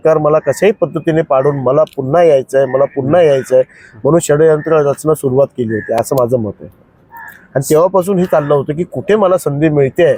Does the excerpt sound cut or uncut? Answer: uncut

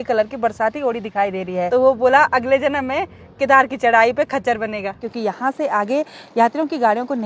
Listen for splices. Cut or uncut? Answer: cut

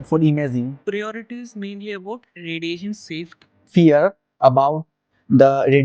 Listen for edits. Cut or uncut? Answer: cut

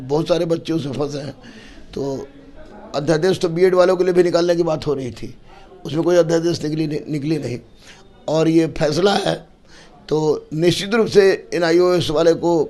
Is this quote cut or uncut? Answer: uncut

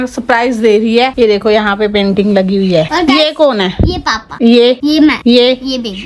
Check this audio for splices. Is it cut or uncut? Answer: uncut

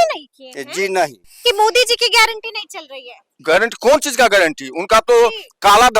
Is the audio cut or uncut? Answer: cut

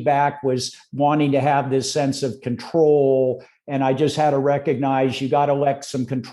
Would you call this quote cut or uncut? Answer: uncut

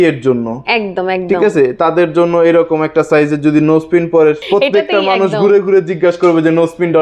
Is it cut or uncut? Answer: cut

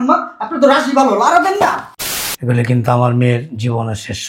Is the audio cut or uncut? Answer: cut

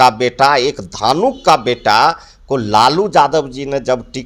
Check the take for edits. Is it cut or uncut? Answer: uncut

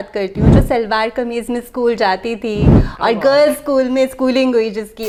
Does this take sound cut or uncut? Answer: uncut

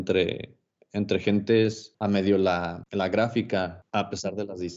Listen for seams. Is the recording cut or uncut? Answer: cut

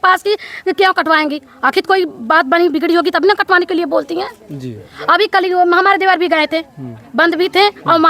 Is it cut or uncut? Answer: uncut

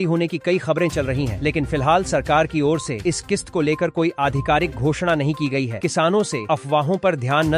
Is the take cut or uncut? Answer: uncut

